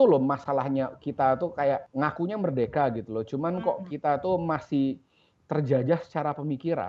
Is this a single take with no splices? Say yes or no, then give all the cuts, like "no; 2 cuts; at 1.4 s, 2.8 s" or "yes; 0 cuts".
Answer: no; 1 cut; at 1.9 s